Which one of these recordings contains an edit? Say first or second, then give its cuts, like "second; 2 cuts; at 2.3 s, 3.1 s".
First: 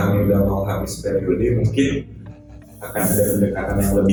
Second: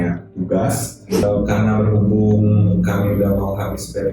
second; 1 cut; at 1.2 s